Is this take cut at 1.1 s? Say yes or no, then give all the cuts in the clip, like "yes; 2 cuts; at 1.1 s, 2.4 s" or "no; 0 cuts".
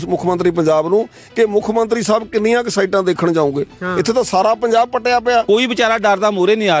no; 1 cut; at 5.4 s